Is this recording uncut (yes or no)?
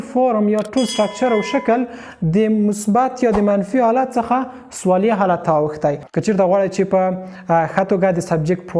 no